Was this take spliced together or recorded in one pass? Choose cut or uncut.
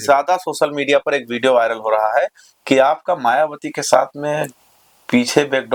uncut